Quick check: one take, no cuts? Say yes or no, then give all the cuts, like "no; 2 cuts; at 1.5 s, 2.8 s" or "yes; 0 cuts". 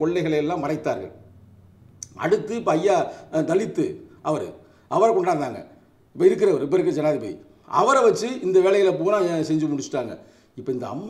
yes; 0 cuts